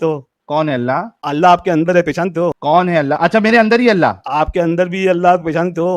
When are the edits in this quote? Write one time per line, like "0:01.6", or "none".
none